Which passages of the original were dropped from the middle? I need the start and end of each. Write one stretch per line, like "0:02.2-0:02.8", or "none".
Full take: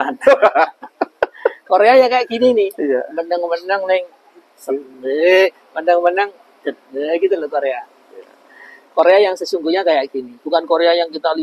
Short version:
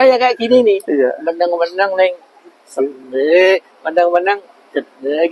none